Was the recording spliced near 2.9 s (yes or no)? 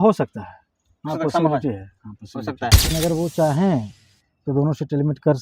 yes